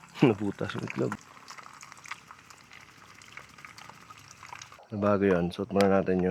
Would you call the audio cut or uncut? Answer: cut